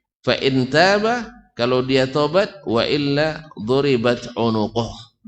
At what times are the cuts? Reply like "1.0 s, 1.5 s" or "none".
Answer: none